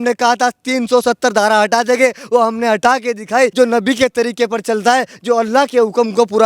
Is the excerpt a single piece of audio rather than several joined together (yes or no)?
no